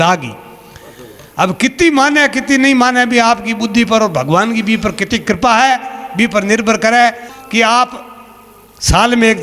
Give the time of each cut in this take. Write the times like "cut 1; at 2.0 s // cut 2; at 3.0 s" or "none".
cut 1; at 7.3 s